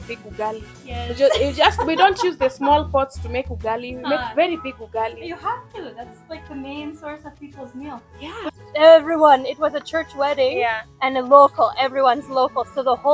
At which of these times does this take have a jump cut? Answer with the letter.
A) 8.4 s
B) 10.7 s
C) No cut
A